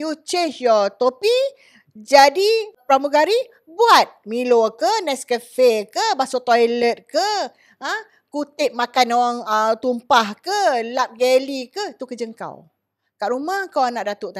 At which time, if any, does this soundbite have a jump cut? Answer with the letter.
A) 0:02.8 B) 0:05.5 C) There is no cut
A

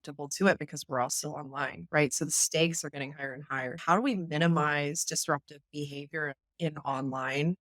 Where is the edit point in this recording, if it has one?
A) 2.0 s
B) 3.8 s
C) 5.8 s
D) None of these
B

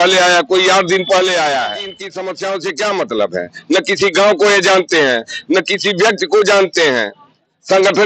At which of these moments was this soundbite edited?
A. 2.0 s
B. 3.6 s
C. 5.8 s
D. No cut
A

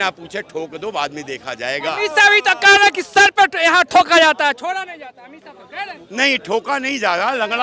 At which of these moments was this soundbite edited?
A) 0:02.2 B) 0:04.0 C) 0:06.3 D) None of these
D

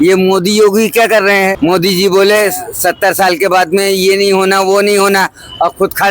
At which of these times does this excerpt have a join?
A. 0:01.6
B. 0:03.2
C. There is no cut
A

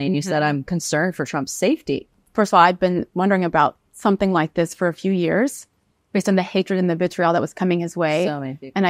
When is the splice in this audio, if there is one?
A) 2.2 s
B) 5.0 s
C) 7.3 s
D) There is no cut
A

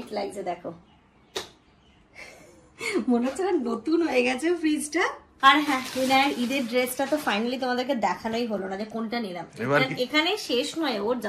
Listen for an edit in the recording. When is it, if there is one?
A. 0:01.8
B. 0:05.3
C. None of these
B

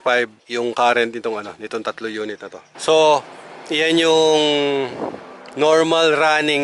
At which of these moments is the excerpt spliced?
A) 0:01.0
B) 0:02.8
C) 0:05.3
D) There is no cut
B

